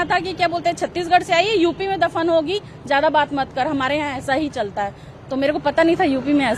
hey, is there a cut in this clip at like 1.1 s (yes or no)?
no